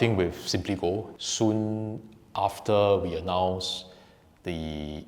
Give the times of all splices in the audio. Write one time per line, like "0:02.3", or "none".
0:01.1